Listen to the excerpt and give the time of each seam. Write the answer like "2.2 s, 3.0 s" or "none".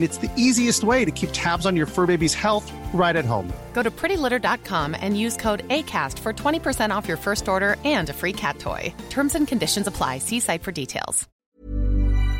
11.2 s

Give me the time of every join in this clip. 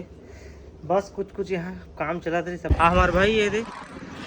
2.7 s

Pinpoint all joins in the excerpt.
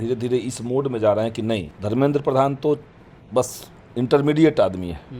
1.7 s

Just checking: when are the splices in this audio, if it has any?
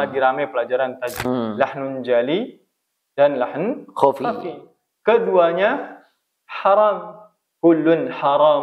1.2 s

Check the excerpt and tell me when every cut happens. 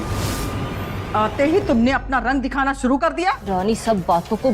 3.4 s

